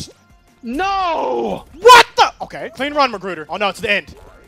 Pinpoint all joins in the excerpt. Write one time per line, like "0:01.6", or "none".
0:01.7
0:02.8